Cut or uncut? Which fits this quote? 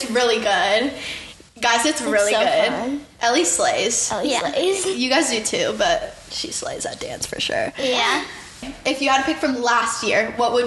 uncut